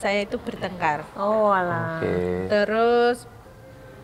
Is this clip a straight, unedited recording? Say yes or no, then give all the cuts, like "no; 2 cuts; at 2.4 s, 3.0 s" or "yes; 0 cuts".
yes; 0 cuts